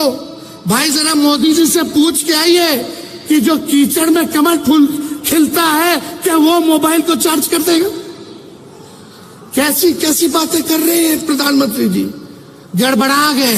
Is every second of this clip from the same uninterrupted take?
yes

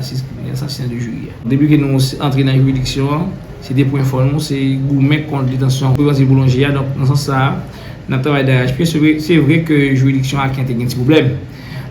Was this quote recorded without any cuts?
no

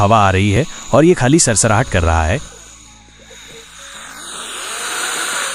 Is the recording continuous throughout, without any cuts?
yes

